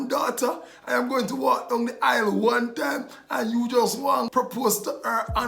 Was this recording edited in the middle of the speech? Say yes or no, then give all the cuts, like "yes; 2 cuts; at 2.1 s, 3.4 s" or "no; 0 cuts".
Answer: yes; 1 cut; at 4.3 s